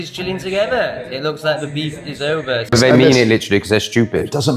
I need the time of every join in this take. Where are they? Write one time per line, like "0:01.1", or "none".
0:02.7